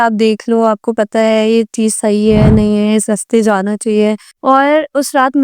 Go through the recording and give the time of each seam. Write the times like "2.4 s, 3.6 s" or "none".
4.3 s